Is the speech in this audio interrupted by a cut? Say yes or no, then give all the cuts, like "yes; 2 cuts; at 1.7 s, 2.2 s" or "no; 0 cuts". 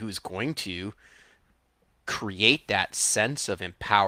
no; 0 cuts